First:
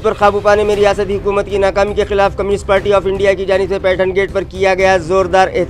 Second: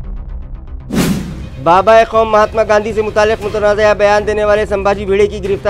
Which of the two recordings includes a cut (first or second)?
second